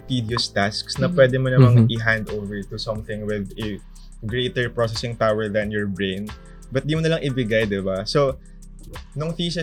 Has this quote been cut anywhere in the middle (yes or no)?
no